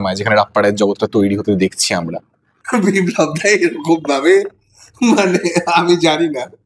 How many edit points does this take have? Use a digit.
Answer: 1